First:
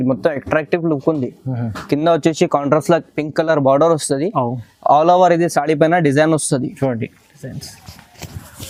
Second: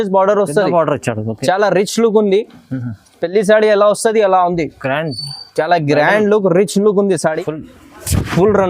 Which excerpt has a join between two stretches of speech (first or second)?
second